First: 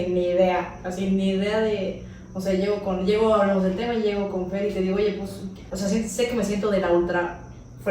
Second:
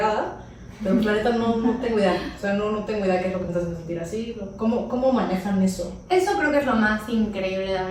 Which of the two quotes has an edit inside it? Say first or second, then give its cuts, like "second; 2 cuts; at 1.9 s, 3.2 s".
first; 1 cut; at 5.7 s